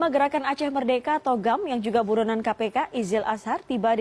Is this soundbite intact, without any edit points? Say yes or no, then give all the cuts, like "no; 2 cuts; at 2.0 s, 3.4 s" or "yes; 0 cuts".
yes; 0 cuts